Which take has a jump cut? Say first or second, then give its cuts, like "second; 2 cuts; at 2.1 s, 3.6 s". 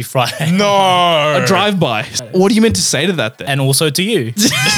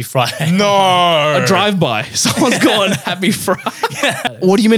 first; 2 cuts; at 2.2 s, 3.4 s